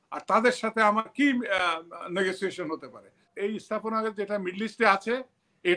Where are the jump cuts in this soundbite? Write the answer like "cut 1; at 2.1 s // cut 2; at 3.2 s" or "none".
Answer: cut 1; at 3.3 s